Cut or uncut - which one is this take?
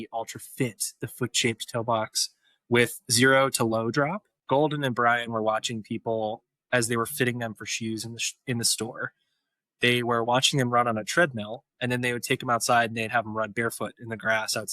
cut